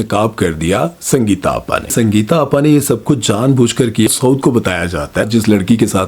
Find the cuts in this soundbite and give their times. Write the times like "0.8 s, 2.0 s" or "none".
1.9 s, 4.1 s, 5.3 s